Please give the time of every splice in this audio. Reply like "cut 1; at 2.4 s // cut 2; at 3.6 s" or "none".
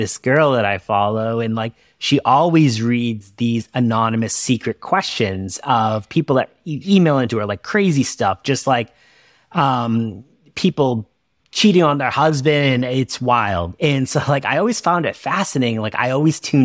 none